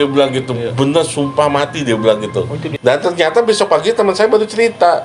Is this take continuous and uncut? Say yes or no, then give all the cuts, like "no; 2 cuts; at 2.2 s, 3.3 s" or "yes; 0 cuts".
no; 1 cut; at 2.6 s